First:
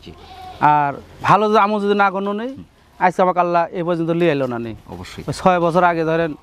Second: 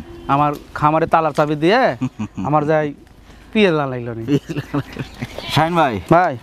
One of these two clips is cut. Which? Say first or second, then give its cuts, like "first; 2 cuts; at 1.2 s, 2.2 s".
second; 1 cut; at 5.4 s